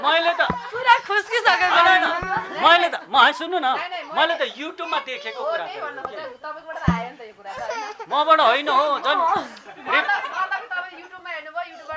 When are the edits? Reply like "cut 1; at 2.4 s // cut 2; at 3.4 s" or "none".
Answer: none